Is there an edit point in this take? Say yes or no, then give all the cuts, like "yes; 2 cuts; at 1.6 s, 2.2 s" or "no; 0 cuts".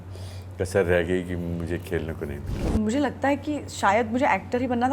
yes; 1 cut; at 2.7 s